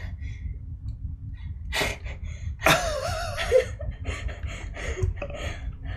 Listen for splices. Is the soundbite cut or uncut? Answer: cut